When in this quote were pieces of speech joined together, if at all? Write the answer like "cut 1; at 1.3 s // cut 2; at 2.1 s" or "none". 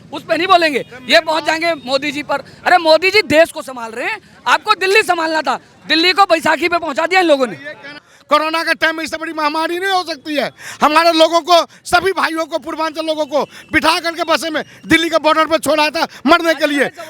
cut 1; at 8.1 s